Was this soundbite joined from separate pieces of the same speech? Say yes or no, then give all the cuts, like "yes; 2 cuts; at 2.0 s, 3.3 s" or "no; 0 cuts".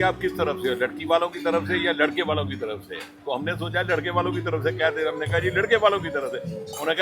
no; 0 cuts